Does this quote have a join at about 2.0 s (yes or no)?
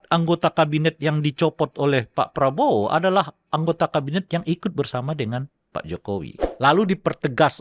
no